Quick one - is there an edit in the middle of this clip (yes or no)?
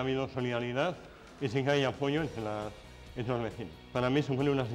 no